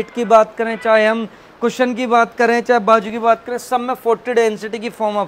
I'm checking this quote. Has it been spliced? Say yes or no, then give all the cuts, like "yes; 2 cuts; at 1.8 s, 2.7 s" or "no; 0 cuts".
no; 0 cuts